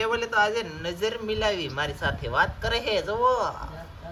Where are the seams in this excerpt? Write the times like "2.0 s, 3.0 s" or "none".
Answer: none